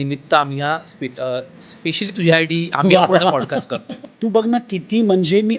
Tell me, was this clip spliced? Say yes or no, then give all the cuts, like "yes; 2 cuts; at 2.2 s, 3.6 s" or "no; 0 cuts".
yes; 1 cut; at 4.1 s